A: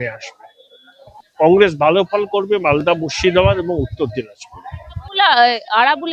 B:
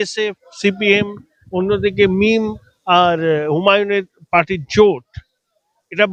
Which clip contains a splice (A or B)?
A